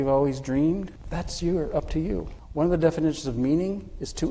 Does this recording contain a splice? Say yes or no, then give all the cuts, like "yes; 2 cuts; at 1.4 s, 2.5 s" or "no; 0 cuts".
yes; 2 cuts; at 1.0 s, 2.4 s